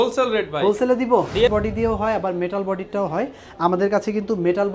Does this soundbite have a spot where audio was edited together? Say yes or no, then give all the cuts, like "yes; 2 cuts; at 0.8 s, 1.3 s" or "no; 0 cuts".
yes; 1 cut; at 1.5 s